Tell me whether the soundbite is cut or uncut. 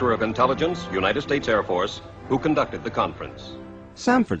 cut